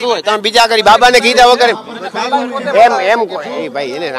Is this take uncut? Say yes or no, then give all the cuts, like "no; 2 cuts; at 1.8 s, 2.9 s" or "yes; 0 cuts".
yes; 0 cuts